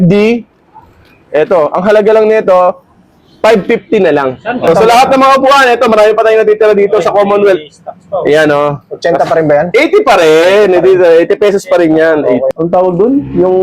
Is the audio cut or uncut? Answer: cut